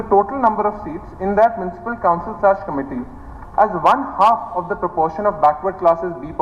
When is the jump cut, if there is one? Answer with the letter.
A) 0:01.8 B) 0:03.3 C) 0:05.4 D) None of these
D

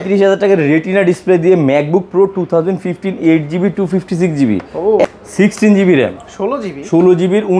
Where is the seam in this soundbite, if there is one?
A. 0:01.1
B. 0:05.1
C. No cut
B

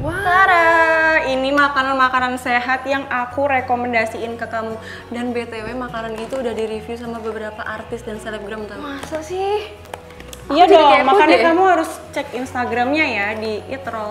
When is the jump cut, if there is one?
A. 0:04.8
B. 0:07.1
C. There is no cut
C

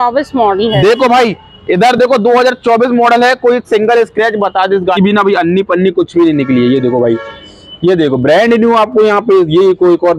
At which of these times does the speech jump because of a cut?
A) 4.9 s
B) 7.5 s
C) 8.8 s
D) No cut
A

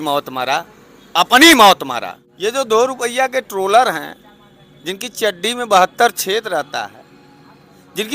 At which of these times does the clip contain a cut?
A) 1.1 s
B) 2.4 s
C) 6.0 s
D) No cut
B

